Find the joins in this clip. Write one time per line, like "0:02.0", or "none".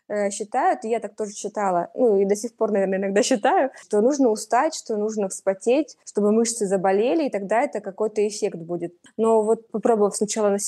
0:03.8
0:06.0
0:09.0
0:09.7